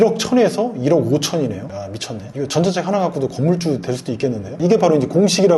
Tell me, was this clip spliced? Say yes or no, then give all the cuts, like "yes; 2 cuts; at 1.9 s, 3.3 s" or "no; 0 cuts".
yes; 1 cut; at 4.5 s